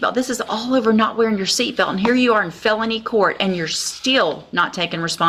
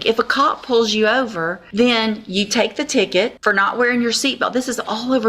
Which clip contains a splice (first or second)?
second